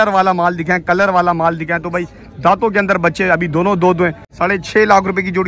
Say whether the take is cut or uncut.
cut